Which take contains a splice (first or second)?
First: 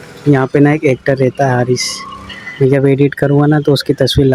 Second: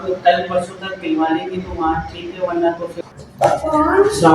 second